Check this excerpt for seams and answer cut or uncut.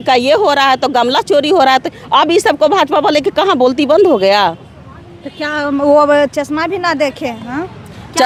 uncut